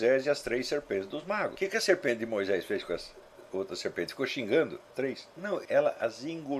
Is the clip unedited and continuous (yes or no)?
no